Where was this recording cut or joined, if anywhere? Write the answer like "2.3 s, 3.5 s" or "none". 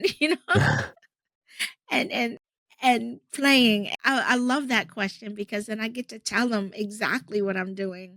2.4 s, 3.9 s